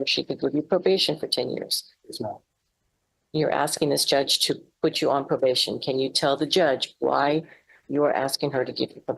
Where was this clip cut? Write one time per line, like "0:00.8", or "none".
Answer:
none